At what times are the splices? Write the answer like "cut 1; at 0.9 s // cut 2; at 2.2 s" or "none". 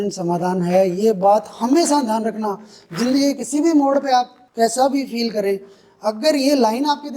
cut 1; at 4.4 s